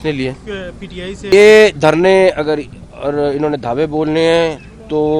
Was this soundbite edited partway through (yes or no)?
yes